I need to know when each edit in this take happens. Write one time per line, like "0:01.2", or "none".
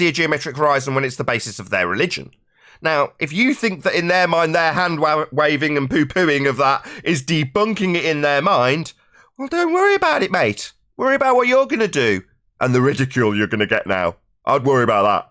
none